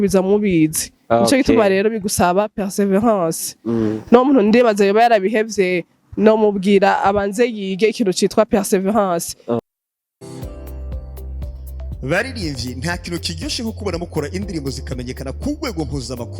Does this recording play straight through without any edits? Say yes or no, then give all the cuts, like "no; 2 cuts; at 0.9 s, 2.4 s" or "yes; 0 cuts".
no; 1 cut; at 9.6 s